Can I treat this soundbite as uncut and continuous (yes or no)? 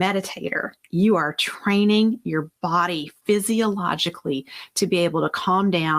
yes